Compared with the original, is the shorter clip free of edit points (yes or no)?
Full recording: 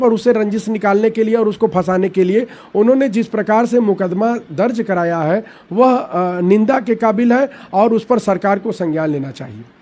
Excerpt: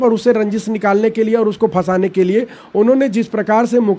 yes